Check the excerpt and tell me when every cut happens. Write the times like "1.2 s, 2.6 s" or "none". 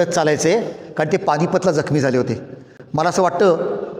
none